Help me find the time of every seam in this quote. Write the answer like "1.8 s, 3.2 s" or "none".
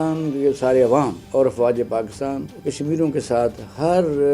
1.2 s, 2.5 s